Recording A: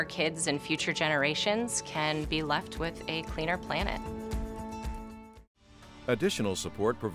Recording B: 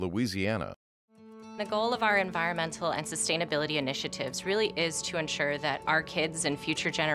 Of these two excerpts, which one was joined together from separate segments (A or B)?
A